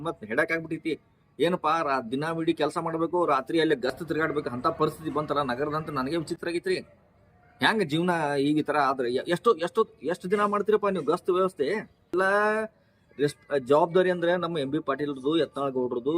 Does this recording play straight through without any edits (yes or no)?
no